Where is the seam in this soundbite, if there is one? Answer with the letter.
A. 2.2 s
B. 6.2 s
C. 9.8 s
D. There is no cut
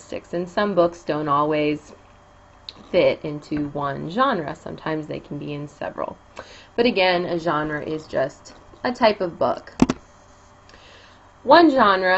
C